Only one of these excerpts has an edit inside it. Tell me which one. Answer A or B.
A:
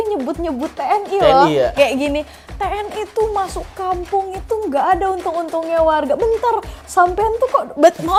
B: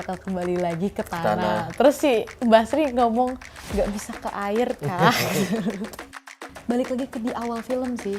B